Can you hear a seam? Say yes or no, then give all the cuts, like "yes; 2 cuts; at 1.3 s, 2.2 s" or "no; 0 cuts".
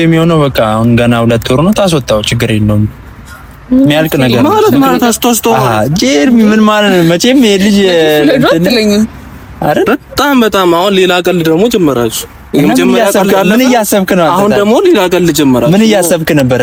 no; 0 cuts